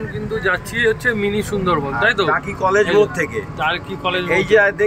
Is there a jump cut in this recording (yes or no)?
no